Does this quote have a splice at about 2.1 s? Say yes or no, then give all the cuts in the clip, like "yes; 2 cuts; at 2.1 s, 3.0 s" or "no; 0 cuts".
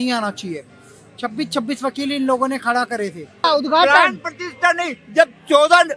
no; 1 cut; at 3.4 s